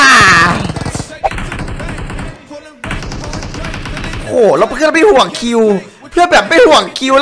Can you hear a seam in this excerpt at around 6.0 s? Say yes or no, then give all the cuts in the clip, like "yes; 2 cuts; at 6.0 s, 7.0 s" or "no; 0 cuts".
no; 1 cut; at 1.1 s